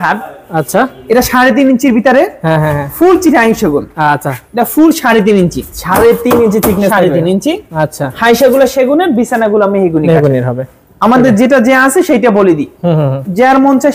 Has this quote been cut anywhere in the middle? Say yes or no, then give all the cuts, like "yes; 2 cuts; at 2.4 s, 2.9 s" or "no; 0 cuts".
no; 0 cuts